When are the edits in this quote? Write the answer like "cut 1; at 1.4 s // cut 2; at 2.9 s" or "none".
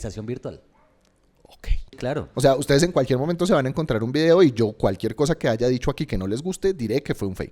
cut 1; at 2.0 s